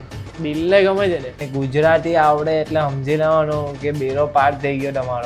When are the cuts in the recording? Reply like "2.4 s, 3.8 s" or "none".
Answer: 1.4 s